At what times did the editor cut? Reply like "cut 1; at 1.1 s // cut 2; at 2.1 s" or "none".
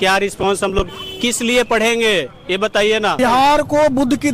cut 1; at 3.2 s